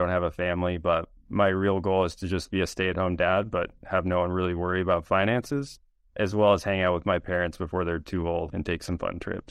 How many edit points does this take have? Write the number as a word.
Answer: one